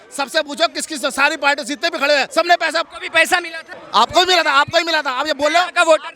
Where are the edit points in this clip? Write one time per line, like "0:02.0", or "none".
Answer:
0:02.3
0:03.0

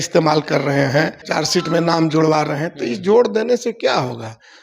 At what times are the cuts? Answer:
0:01.2

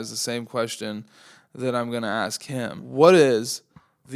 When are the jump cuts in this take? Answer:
0:02.8

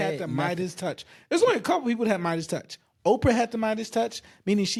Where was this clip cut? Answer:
none

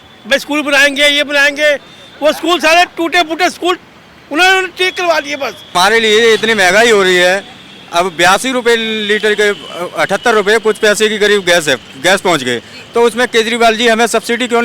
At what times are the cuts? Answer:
0:05.7

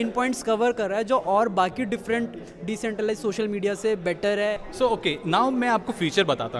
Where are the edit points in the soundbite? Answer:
0:04.6

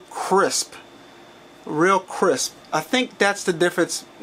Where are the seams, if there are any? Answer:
none

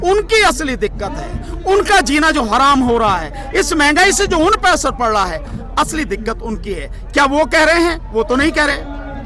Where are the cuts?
none

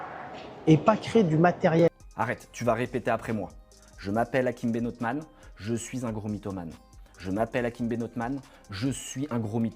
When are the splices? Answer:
0:01.9

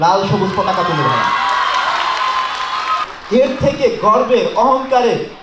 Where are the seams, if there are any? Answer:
0:03.0

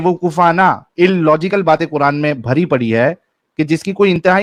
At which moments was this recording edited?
none

